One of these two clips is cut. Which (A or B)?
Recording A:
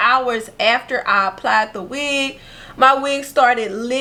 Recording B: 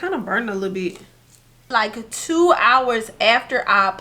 B